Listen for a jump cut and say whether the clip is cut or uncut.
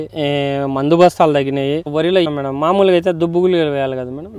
cut